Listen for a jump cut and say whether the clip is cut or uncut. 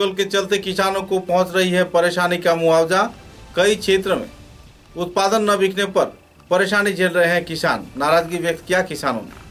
uncut